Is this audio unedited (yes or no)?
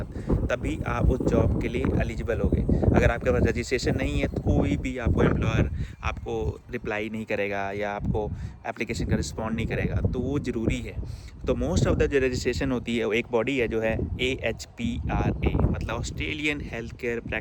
yes